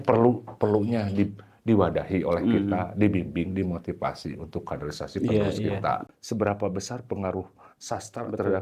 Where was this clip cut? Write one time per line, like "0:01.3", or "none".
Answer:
0:06.1